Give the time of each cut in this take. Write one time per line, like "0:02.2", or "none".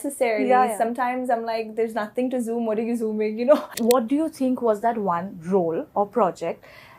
0:03.8